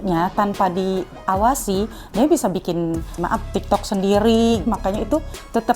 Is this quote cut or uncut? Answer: cut